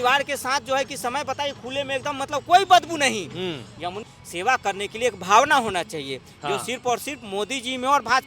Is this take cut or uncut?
cut